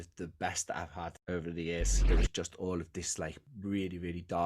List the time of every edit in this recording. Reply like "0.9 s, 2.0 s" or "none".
2.0 s